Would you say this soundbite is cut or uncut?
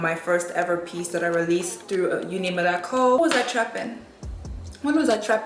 cut